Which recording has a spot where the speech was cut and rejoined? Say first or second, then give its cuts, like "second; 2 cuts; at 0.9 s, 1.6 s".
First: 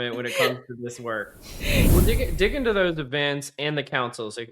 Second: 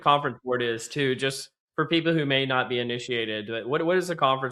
first; 1 cut; at 1.9 s